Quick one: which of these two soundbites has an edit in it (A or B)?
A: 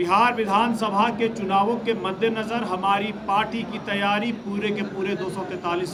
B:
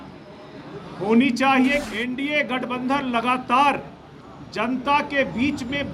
B